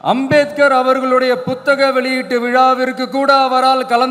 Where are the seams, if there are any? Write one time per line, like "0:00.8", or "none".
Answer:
none